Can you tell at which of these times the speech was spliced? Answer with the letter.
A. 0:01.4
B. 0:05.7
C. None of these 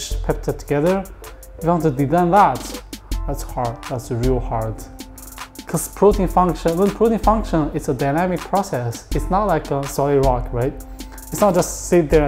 C